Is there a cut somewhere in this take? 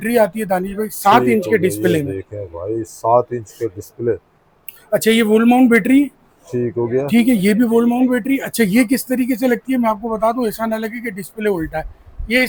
no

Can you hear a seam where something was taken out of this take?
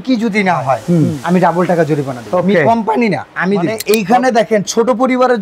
yes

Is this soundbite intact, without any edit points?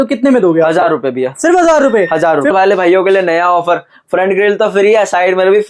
no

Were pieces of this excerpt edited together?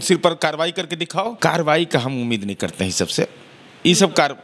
yes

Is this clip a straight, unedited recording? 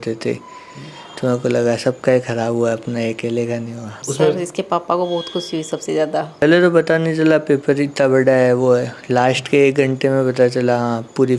no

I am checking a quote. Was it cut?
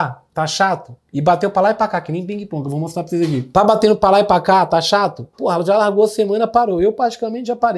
no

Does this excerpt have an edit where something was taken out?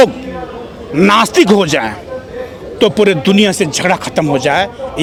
no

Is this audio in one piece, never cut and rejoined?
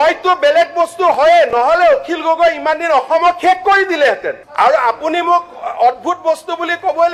no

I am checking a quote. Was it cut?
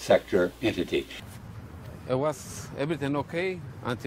yes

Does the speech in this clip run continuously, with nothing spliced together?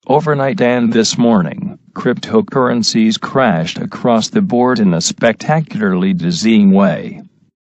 no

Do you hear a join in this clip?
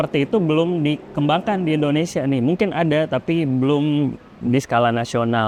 no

